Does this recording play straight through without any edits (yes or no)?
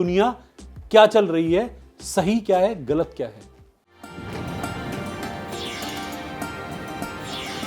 no